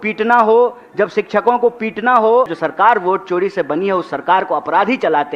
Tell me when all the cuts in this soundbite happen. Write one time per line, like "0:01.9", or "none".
0:02.5